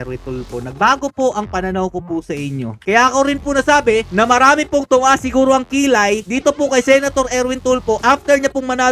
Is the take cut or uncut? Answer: cut